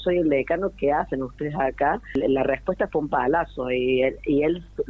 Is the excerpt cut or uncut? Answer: cut